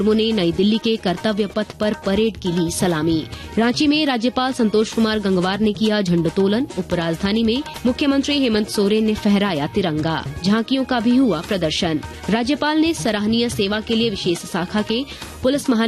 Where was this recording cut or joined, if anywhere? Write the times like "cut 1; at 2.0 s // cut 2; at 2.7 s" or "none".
cut 1; at 3.4 s // cut 2; at 7.7 s // cut 3; at 10.3 s // cut 4; at 12.1 s